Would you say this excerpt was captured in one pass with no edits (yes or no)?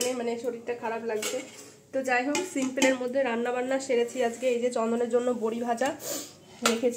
yes